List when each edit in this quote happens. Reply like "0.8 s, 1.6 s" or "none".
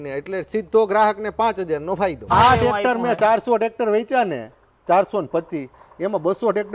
2.2 s